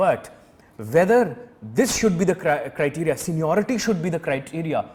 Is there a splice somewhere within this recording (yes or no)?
no